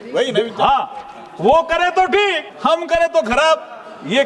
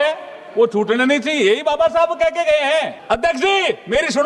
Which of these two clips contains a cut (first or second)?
second